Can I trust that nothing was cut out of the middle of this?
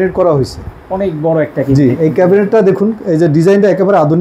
yes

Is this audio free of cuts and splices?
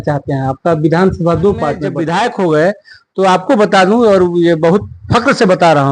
no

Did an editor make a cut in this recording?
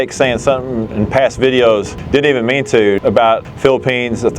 yes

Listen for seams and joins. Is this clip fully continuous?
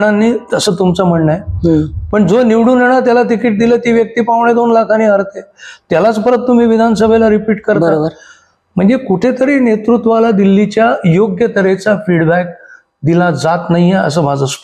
yes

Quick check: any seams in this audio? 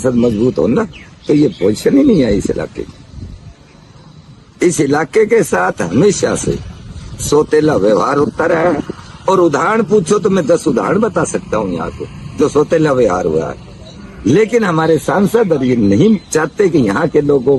no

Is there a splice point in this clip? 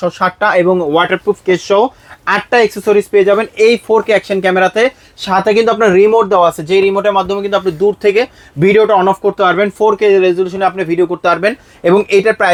no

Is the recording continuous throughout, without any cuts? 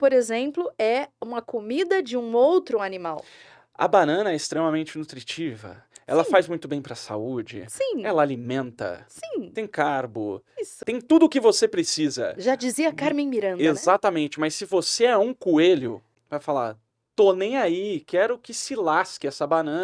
no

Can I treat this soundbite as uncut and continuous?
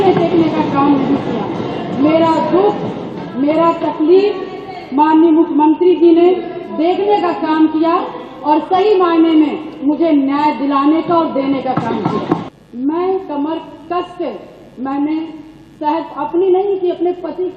no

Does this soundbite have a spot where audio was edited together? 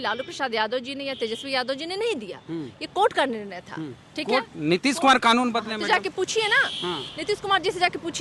no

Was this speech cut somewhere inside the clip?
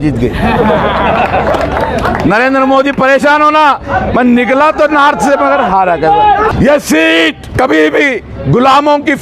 yes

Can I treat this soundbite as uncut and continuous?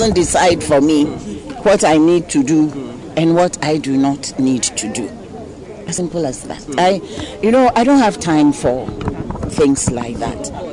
yes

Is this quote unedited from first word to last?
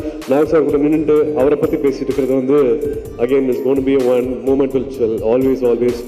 yes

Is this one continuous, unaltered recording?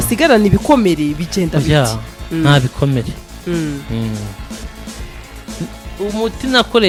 yes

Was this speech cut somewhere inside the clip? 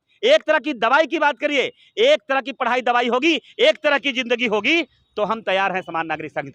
no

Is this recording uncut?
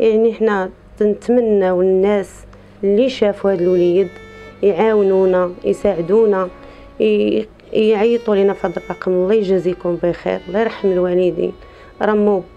yes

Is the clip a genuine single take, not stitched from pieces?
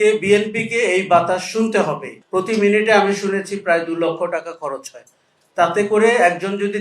no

